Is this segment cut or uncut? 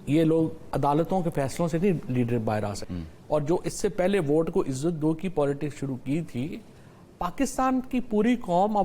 cut